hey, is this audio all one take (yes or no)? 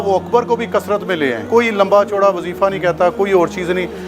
no